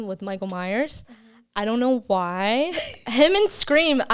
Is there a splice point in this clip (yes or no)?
no